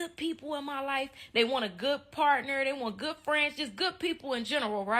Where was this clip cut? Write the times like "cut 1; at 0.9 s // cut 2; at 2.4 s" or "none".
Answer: none